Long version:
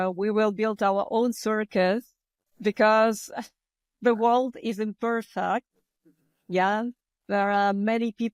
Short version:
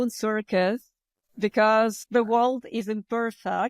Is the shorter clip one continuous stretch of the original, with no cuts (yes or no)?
no